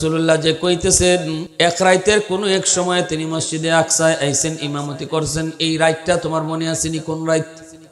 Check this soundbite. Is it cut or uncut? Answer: cut